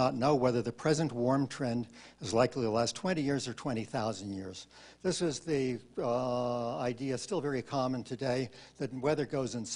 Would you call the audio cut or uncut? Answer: uncut